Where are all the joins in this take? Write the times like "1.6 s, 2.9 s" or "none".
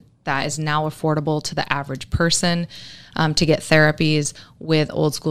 none